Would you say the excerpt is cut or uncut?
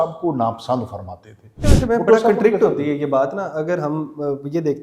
cut